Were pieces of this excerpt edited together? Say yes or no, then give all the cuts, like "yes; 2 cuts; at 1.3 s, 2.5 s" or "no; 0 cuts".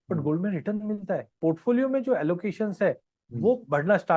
yes; 1 cut; at 1.4 s